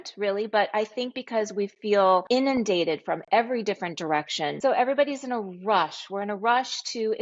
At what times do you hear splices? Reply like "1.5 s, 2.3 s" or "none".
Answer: 2.2 s, 4.5 s